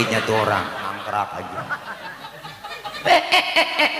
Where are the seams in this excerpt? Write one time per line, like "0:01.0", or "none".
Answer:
0:00.9